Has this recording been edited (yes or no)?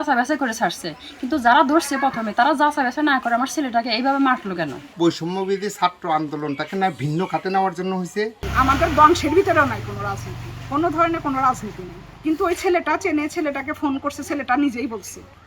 yes